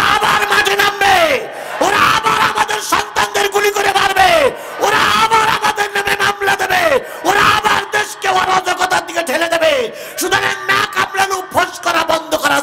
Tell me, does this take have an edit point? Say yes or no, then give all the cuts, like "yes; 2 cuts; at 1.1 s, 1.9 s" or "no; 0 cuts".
no; 0 cuts